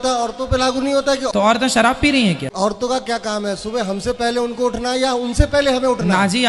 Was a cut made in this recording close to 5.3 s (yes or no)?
no